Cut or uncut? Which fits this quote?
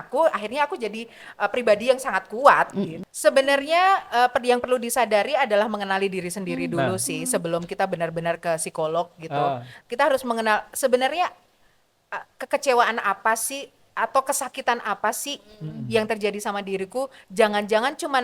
cut